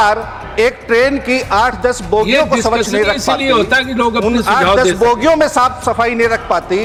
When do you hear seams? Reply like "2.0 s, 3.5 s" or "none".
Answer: none

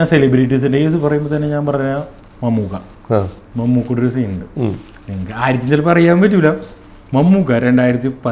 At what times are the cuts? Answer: none

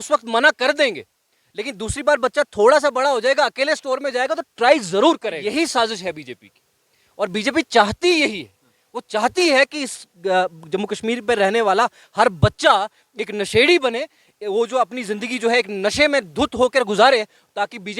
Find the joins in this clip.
5.4 s

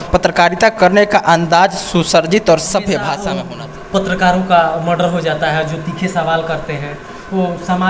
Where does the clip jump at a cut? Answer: 3.2 s

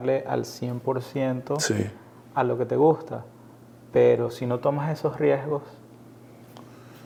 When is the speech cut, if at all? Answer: none

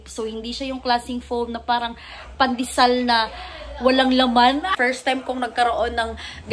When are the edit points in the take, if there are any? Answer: 4.7 s

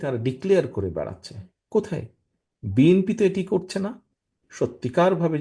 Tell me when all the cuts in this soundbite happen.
4.4 s

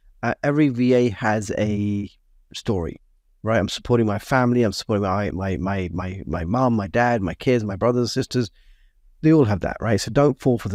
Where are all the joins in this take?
none

